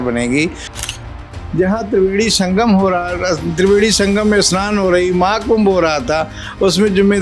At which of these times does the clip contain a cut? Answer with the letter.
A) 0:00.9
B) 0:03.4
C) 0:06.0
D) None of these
A